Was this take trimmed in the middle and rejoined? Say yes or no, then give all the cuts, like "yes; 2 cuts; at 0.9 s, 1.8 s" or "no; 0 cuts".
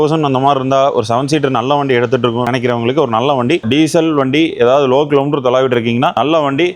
yes; 1 cut; at 3.6 s